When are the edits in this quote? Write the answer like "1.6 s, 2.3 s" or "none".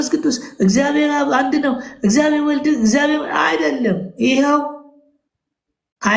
none